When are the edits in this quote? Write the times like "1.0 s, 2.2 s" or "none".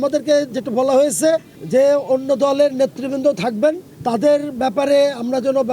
1.5 s, 3.9 s